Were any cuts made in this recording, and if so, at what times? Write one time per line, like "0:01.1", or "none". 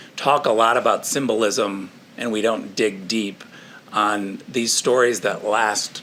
none